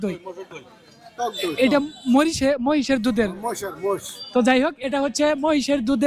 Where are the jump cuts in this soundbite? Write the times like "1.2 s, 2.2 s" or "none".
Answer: none

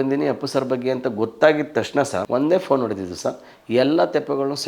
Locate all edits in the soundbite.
2.2 s

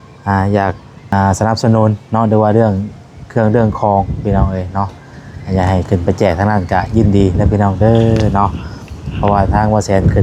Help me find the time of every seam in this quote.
0.9 s

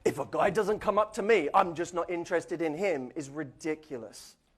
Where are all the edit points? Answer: 1.1 s

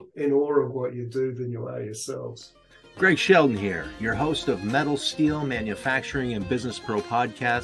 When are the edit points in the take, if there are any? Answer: 2.8 s

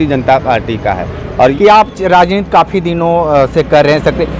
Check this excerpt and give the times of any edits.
1.5 s

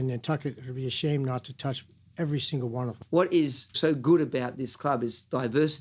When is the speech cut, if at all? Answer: 3.0 s, 3.7 s

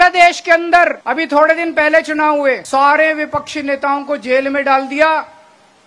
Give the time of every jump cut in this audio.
1.0 s, 2.6 s

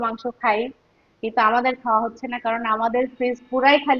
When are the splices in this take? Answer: none

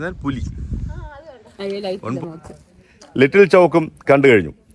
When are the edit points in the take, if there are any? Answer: 1.5 s

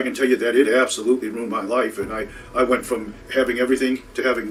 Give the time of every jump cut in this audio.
none

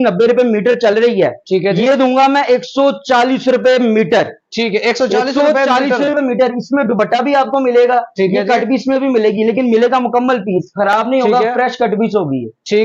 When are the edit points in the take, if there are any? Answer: none

